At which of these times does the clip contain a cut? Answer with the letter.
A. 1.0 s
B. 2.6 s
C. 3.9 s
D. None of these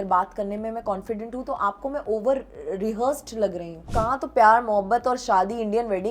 C